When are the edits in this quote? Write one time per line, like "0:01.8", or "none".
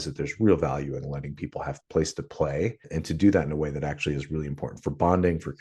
0:02.8